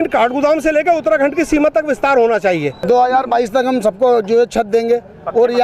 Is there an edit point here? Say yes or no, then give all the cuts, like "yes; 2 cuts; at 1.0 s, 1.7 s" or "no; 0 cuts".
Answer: yes; 1 cut; at 2.8 s